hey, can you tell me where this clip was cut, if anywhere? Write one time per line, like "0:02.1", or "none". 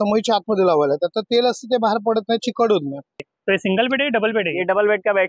0:03.2